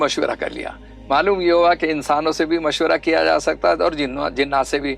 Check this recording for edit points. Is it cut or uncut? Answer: uncut